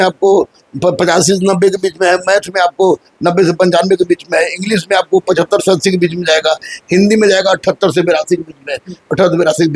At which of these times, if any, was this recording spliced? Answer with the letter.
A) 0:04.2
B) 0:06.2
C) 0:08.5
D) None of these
D